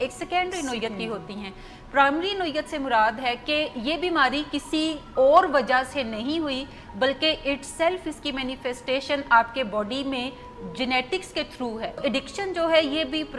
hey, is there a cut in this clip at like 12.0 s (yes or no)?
yes